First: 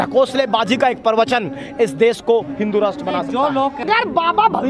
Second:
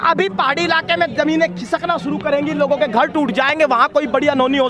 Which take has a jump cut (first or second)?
first